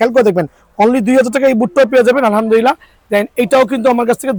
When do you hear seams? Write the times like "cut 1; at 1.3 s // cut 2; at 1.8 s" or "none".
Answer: none

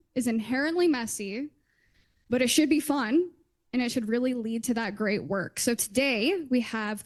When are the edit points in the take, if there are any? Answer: none

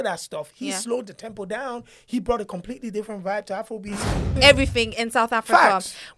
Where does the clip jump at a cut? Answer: cut 1; at 4.3 s

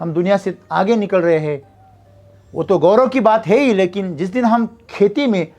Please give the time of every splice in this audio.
none

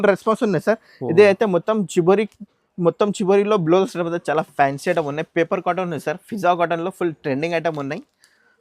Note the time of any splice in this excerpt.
cut 1; at 3.9 s

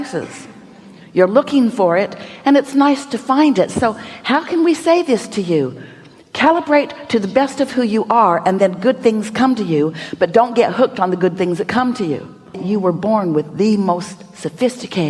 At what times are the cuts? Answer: cut 1; at 12.6 s

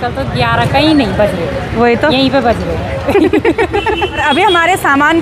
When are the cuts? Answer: cut 1; at 4.2 s

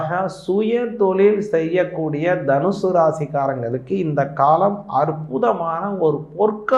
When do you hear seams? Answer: none

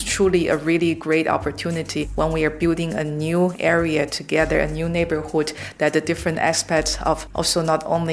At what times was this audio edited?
cut 1; at 2.1 s // cut 2; at 7.3 s

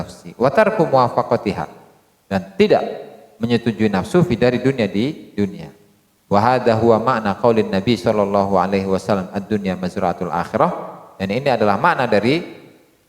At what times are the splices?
cut 1; at 7.1 s

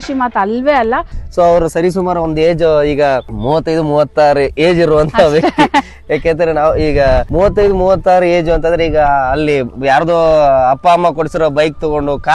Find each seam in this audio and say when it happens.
cut 1; at 1.2 s // cut 2; at 3.3 s // cut 3; at 7.3 s

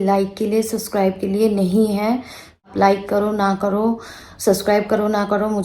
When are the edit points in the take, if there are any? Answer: cut 1; at 2.7 s

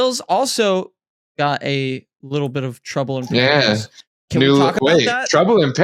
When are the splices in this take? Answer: none

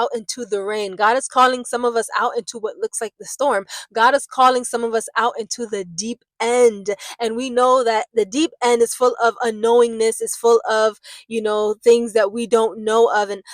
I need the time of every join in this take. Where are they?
none

